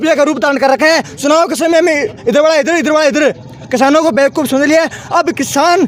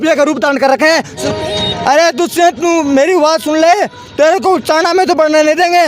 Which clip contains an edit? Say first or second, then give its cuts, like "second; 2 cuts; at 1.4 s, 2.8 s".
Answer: second; 1 cut; at 1.1 s